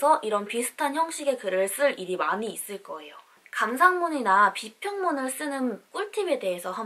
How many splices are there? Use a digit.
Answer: 1